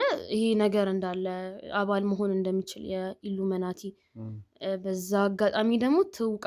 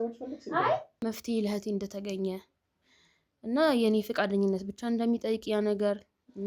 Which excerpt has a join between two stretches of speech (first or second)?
second